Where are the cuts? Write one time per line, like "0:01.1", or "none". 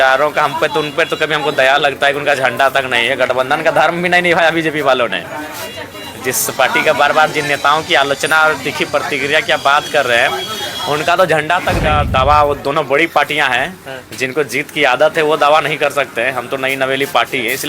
0:11.8